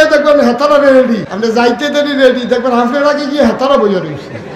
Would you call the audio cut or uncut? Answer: cut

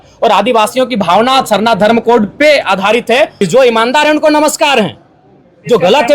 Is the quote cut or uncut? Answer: cut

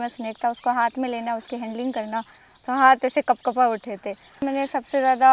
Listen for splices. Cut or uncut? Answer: cut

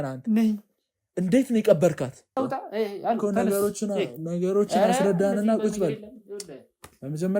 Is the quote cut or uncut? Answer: cut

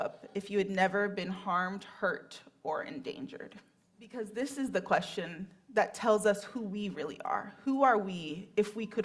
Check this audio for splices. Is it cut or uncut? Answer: cut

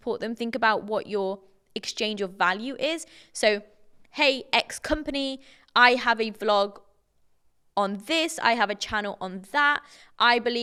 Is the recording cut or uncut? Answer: uncut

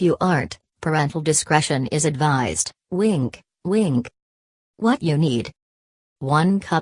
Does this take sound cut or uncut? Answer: uncut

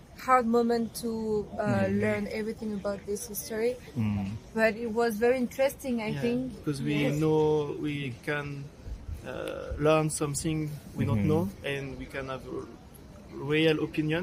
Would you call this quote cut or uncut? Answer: uncut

